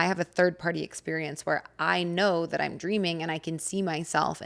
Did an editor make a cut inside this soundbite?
no; 0 cuts

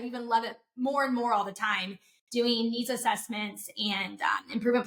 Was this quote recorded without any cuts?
yes; 0 cuts

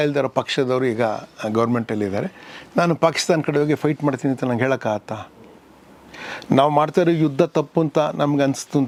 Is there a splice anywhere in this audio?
no; 0 cuts

